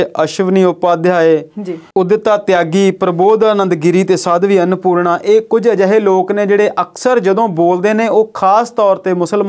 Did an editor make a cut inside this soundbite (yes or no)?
no